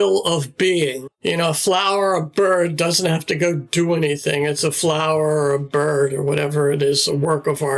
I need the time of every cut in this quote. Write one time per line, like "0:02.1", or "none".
0:01.1